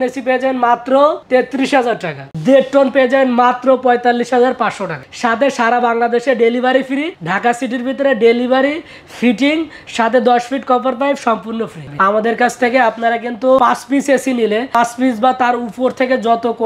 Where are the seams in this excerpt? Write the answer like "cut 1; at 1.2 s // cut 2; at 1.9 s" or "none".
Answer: cut 1; at 2.3 s // cut 2; at 5.0 s // cut 3; at 12.0 s